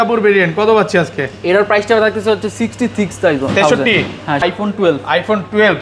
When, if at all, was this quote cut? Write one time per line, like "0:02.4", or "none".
0:04.4